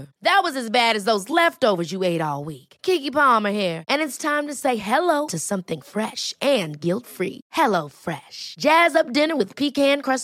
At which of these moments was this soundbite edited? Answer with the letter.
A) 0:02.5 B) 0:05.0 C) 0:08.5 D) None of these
D